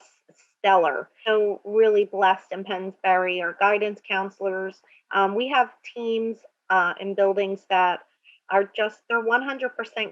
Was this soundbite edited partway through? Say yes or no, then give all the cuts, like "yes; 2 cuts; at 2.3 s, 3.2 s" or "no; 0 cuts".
yes; 1 cut; at 1.1 s